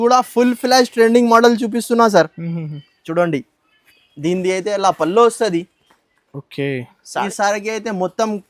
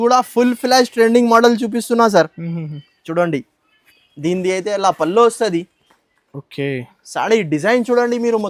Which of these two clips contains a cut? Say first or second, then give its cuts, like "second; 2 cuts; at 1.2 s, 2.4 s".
first; 1 cut; at 7.2 s